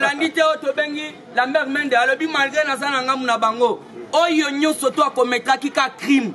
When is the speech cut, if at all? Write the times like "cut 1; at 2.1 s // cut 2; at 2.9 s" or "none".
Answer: none